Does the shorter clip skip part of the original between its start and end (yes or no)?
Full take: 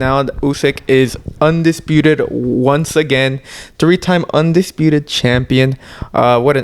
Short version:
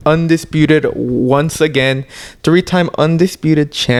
no